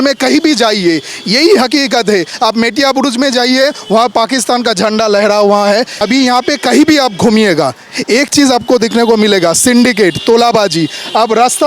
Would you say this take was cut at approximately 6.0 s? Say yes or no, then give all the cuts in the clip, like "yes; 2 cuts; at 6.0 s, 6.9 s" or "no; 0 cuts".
yes; 1 cut; at 6.0 s